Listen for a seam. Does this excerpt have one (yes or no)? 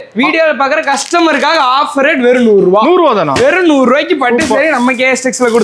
no